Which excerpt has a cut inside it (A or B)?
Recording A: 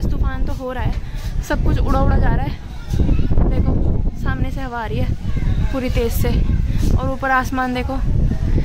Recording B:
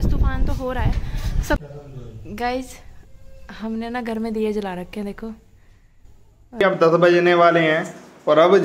B